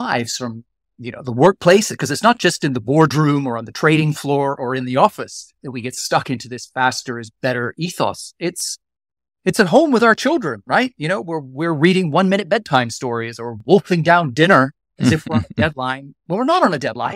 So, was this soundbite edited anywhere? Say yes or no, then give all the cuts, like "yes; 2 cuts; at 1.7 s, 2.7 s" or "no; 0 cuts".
yes; 2 cuts; at 14.8 s, 16.1 s